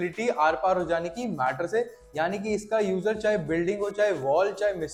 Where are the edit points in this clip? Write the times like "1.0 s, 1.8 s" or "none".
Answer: none